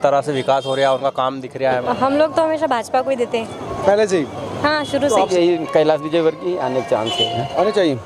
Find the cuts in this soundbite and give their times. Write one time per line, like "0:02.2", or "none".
0:01.8
0:05.3